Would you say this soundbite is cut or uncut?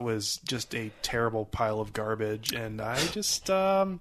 uncut